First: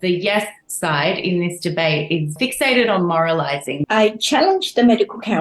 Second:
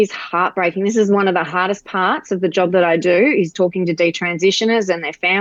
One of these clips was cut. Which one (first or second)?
first